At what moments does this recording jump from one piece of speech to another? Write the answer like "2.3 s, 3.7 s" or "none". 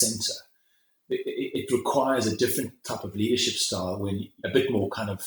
4.3 s

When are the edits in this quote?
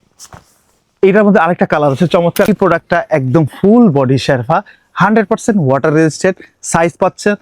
2.5 s

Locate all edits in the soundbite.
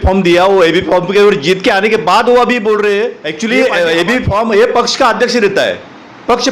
3.2 s

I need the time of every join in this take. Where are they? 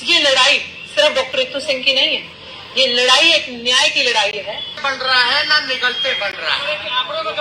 4.8 s

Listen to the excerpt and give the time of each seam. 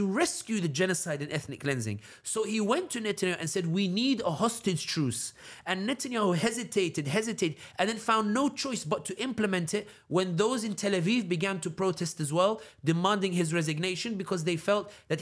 none

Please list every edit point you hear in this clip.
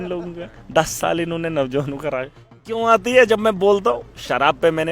2.7 s

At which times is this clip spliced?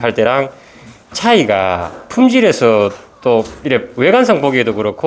none

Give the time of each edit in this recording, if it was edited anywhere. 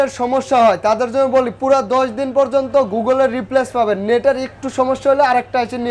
none

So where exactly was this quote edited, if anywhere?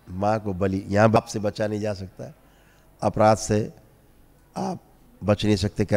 1.2 s

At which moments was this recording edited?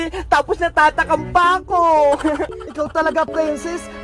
2.6 s

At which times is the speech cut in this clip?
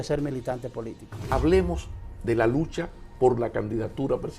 1.3 s

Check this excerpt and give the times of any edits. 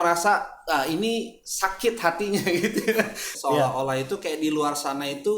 3.2 s

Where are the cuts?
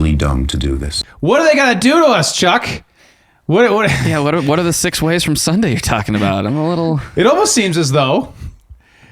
0.9 s

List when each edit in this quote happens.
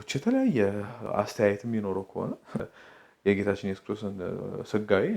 1.0 s, 2.7 s

